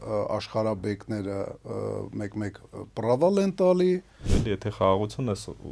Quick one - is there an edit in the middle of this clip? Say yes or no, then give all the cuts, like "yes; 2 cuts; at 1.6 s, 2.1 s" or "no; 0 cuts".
yes; 1 cut; at 4.3 s